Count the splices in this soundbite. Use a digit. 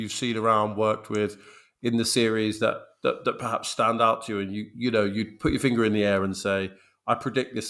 0